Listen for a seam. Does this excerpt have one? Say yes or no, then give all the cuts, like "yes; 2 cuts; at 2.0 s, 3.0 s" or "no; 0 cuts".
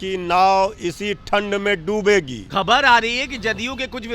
yes; 1 cut; at 2.4 s